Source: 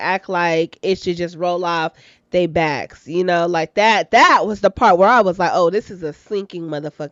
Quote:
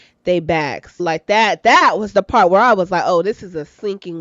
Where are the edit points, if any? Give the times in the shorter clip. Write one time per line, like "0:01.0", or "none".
0:01.0